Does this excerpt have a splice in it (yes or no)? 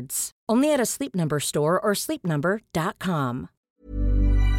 yes